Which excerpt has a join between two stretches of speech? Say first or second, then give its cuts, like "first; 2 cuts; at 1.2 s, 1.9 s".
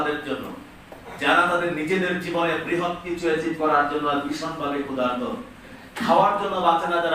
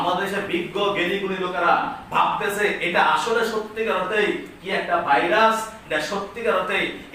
first; 1 cut; at 5.8 s